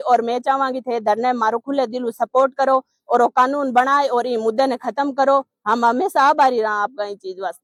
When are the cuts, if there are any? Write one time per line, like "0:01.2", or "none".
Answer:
none